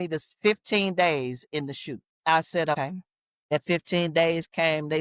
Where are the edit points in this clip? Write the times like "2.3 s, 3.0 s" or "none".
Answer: 2.1 s, 2.7 s

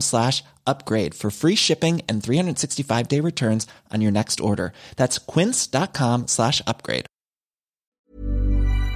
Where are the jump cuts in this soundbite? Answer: 7.9 s

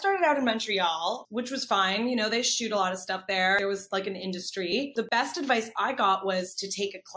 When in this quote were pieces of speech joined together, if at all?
1.2 s, 3.6 s, 5.0 s

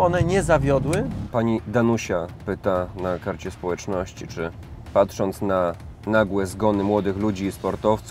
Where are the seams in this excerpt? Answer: 1.2 s

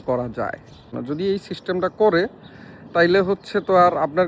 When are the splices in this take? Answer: 0.9 s

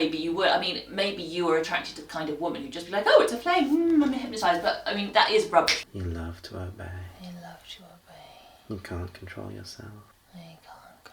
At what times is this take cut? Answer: 5.8 s, 7.1 s, 10.2 s

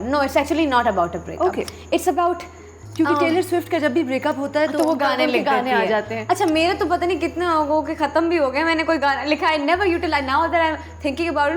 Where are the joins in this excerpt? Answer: none

